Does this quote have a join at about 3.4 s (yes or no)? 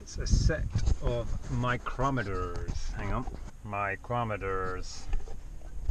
yes